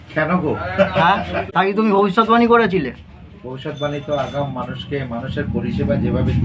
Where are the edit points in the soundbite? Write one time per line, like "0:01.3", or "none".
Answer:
0:01.4